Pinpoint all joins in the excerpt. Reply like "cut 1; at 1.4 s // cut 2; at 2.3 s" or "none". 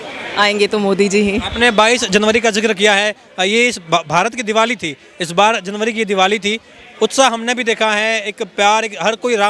none